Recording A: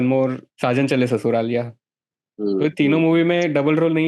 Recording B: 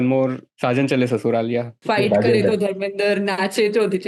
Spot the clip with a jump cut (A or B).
B